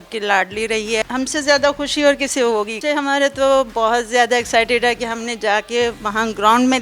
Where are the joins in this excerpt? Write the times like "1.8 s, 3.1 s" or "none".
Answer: 1.0 s, 2.8 s